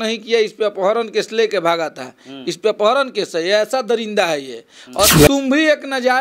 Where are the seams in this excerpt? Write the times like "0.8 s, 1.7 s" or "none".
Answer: 5.1 s